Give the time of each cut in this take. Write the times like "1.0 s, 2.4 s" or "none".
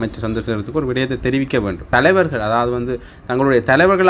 1.8 s

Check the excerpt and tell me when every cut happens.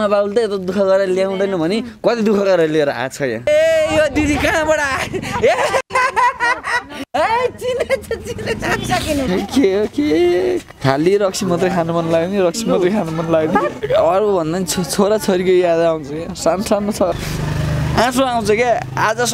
3.5 s, 9.3 s, 13.8 s, 17.2 s

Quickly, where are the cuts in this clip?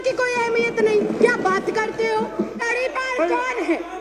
2.7 s

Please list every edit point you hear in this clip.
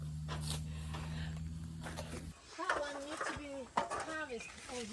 2.2 s

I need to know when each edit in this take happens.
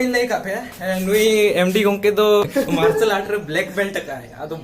2.4 s

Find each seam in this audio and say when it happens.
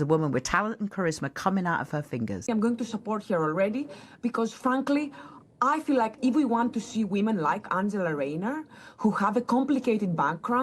2.5 s

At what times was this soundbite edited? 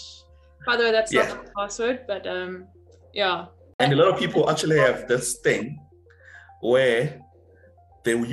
3.6 s

